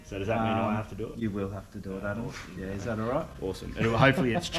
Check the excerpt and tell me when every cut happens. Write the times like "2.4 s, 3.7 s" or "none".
none